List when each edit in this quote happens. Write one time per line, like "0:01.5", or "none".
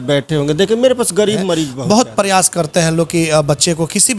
0:01.7